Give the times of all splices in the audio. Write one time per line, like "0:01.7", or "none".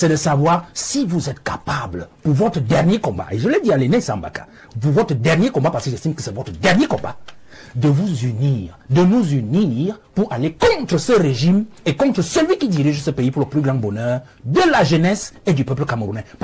none